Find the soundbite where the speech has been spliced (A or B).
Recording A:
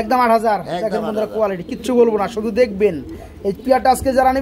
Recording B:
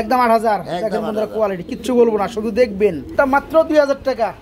B